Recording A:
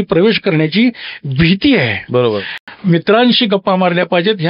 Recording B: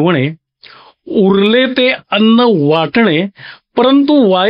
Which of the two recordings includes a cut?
A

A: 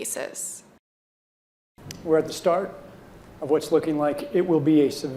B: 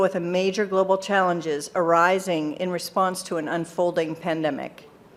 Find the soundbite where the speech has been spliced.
A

